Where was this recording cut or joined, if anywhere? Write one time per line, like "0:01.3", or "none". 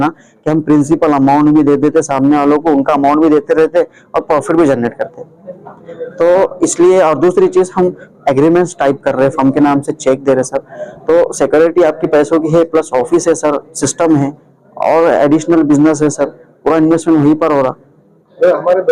none

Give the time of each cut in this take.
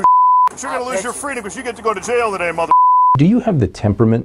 0:03.1

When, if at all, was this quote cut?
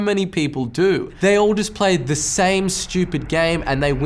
0:01.1

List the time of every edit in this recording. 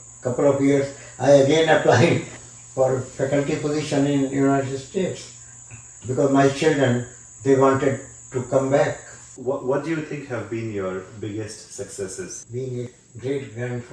0:02.4
0:09.3
0:12.9

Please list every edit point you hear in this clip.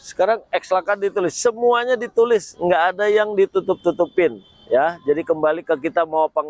none

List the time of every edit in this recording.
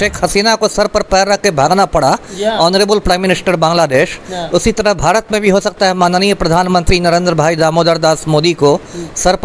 none

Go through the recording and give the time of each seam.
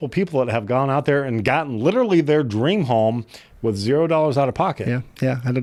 none

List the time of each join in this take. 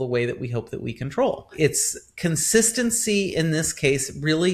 0:01.5

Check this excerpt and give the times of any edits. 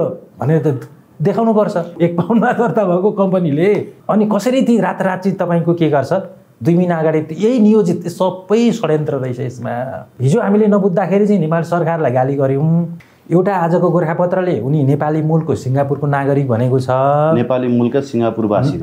0:01.9
0:03.9
0:10.1
0:13.0

